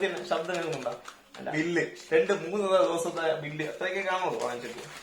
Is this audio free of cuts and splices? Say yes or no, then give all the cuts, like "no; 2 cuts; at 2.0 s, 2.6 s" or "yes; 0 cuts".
no; 1 cut; at 1.5 s